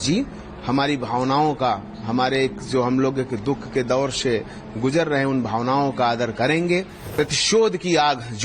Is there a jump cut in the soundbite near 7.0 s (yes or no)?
yes